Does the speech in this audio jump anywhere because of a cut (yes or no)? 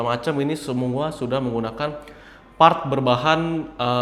no